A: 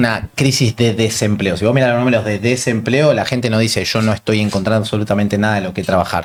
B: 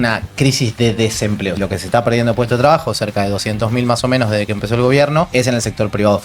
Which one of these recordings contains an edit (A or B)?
B